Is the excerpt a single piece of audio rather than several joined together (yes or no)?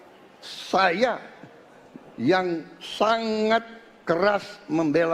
yes